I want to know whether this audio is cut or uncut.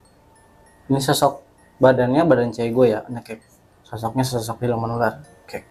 uncut